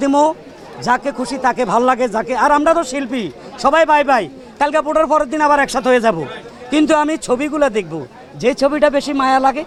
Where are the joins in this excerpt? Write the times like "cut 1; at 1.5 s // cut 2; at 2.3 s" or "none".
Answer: none